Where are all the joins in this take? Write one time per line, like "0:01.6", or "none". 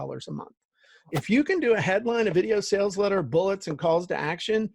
0:01.1

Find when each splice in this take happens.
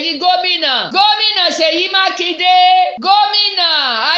0:00.9
0:03.0

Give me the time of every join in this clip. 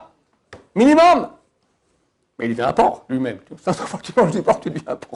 none

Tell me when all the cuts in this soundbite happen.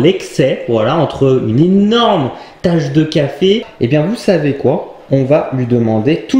0:03.7

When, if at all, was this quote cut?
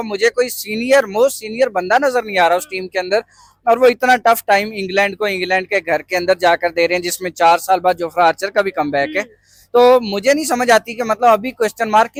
none

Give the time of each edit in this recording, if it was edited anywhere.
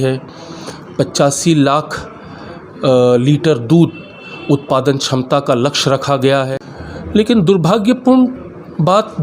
0:06.5

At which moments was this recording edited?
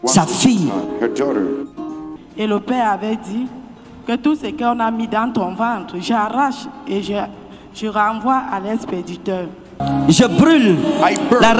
0:02.3
0:09.8

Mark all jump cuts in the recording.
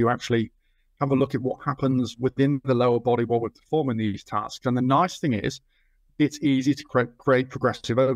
none

